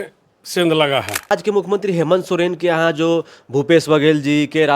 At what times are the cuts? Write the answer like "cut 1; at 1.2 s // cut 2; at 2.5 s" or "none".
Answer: cut 1; at 1.3 s